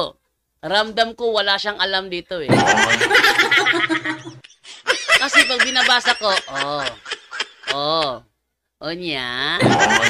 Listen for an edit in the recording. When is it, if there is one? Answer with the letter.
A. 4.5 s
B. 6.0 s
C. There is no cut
C